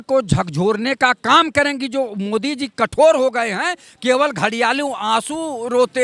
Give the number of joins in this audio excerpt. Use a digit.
0